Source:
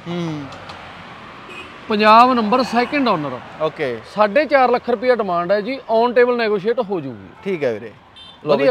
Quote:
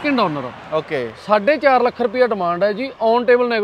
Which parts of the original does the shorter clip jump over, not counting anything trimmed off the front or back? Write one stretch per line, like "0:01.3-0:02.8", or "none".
none